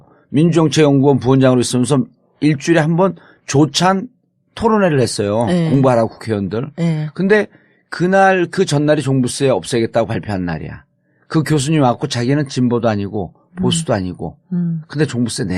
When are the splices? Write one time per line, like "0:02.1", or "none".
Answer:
0:10.8